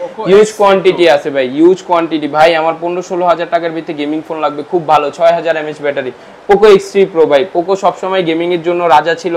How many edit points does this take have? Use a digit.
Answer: 0